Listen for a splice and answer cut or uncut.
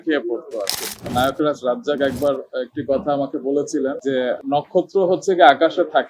cut